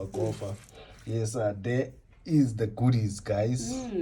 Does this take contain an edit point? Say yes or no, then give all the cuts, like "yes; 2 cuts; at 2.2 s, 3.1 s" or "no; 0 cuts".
no; 0 cuts